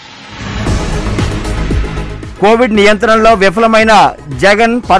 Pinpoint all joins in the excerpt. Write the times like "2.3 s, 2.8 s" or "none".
none